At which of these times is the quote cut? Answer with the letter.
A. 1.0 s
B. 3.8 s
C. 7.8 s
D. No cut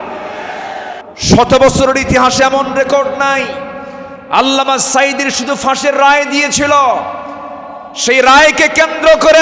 A